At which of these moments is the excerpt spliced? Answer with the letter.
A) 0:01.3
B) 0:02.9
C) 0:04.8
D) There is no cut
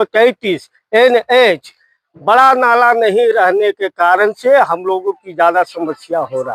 D